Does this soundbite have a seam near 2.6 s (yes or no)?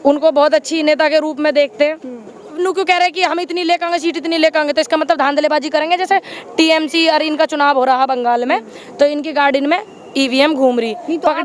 yes